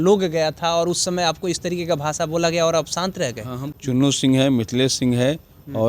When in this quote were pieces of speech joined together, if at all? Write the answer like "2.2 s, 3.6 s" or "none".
3.6 s

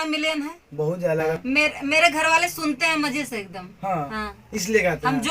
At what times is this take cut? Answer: 1.4 s

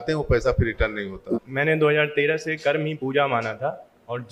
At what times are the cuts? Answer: 1.3 s

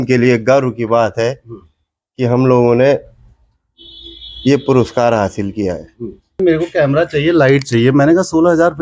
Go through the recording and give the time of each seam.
6.4 s

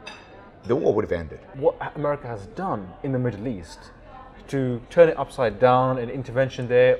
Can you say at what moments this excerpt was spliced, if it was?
1.5 s

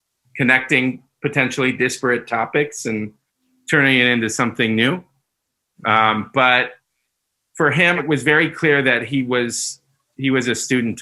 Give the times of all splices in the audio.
8.0 s

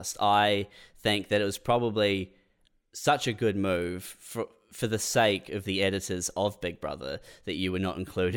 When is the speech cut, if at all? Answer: none

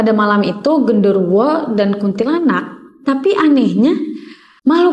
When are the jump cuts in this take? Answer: none

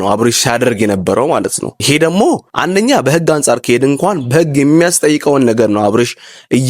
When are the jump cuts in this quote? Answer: 1.7 s, 2.5 s

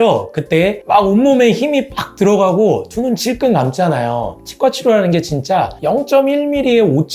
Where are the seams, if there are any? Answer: 4.3 s

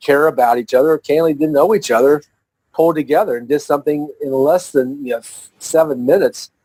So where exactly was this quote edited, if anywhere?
none

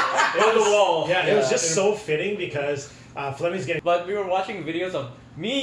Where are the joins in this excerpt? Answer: 3.8 s

